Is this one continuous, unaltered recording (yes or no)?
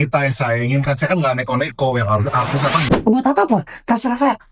no